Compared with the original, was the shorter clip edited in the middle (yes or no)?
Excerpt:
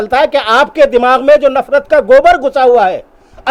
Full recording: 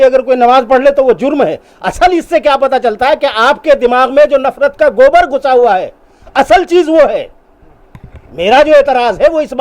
no